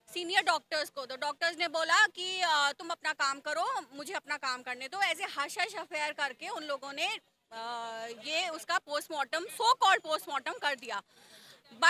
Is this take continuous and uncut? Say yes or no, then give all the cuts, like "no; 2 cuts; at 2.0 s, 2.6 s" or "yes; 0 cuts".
yes; 0 cuts